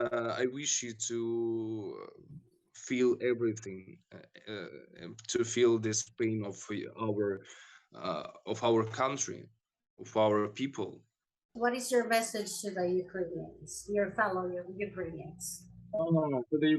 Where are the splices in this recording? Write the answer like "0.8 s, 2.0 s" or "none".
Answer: 11.4 s